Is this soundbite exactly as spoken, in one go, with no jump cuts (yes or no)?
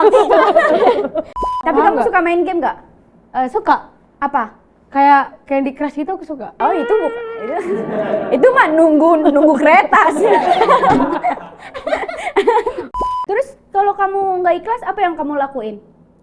no